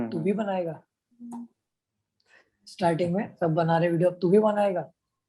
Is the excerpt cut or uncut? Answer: uncut